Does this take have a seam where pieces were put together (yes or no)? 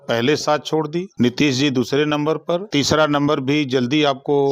no